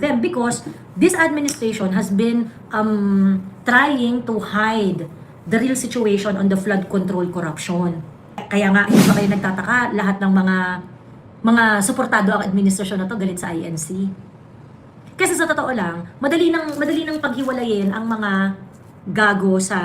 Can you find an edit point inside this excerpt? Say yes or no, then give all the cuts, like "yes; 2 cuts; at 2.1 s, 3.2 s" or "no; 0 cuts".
yes; 1 cut; at 8.5 s